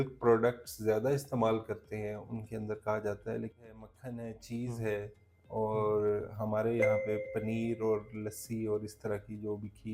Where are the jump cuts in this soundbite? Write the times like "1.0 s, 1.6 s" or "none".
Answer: 3.6 s